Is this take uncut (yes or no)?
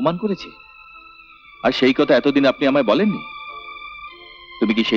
yes